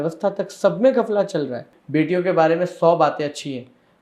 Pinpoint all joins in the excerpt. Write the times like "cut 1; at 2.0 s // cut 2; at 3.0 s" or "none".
cut 1; at 1.7 s